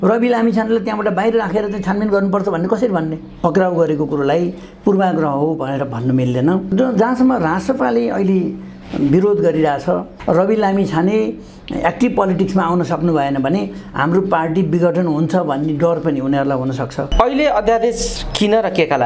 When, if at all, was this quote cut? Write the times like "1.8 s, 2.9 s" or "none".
3.2 s, 6.7 s, 10.1 s, 17.0 s